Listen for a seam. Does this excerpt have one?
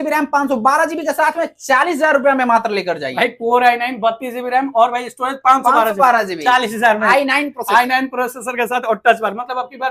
no; 0 cuts

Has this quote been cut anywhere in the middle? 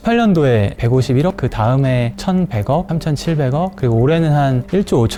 no; 0 cuts

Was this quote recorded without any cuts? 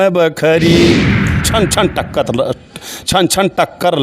no; 1 cut; at 1.5 s

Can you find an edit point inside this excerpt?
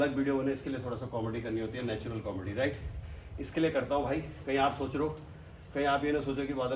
no; 0 cuts

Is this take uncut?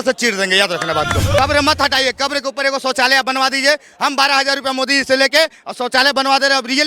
no; 1 cut; at 1.4 s

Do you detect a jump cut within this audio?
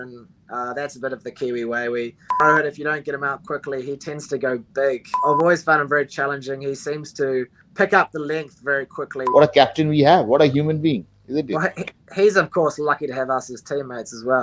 yes; 4 cuts; at 2.4 s, 5.2 s, 7.6 s, 9.2 s

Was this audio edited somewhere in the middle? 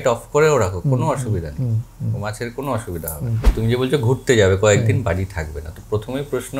yes; 1 cut; at 3.4 s

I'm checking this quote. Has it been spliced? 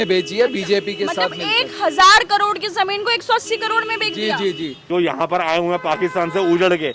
yes; 1 cut; at 4.8 s

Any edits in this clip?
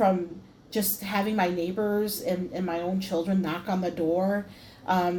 no; 0 cuts

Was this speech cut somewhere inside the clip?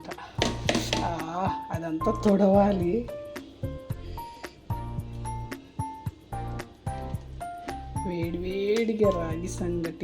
yes; 2 cuts; at 3.1 s, 8.1 s

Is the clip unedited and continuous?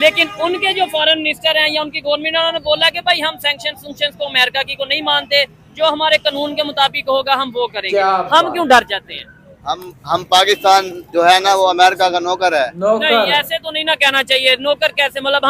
yes; 0 cuts

